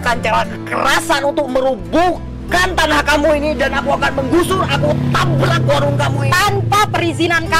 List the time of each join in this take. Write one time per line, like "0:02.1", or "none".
none